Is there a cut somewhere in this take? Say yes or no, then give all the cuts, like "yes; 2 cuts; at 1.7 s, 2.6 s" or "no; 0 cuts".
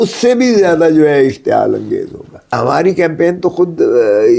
yes; 1 cut; at 2.6 s